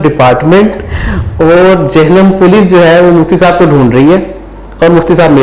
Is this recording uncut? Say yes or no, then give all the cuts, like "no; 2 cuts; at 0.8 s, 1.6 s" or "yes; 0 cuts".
yes; 0 cuts